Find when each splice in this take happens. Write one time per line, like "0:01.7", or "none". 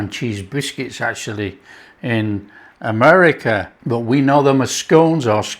0:03.7